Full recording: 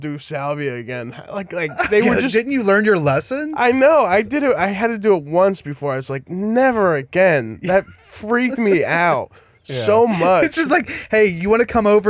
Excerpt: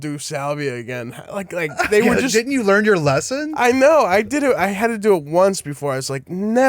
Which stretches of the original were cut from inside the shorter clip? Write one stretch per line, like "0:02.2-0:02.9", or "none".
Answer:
none